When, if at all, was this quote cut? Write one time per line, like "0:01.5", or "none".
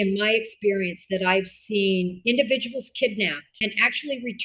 0:02.2
0:03.4